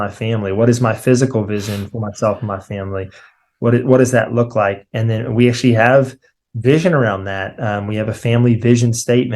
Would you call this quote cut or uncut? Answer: uncut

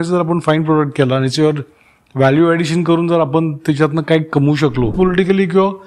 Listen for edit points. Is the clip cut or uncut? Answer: cut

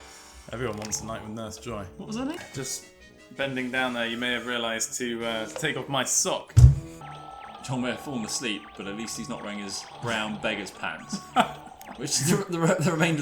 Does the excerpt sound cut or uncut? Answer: cut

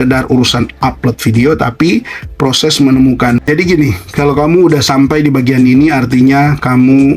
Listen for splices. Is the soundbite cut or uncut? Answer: cut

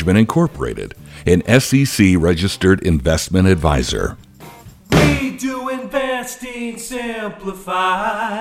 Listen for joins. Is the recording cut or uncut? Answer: cut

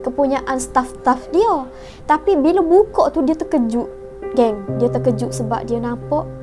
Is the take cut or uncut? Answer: uncut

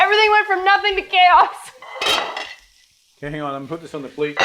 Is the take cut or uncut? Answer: uncut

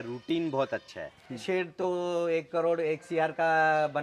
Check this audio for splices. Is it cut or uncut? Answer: cut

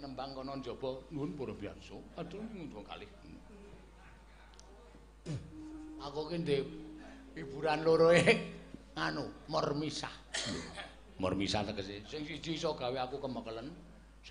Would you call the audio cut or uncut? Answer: cut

